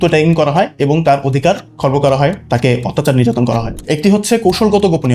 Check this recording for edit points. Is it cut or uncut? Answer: cut